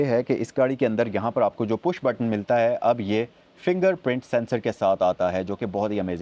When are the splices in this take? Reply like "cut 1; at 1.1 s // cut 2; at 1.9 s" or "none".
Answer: none